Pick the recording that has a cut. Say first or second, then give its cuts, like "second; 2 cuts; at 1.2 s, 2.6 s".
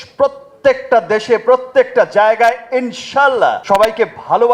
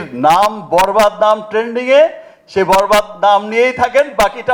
first; 1 cut; at 3.6 s